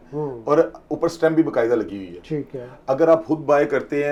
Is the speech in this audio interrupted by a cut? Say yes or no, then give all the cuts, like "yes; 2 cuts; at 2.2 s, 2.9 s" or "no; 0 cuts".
no; 0 cuts